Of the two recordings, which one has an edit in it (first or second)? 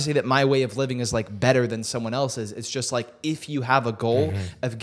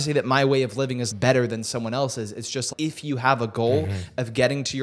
second